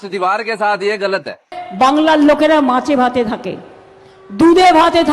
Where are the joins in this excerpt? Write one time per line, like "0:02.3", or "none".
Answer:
0:01.6